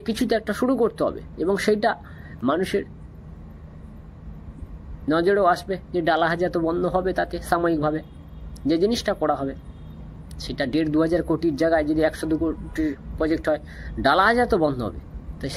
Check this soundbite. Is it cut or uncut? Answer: uncut